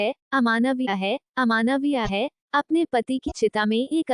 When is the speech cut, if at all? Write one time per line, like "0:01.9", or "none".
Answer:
0:02.1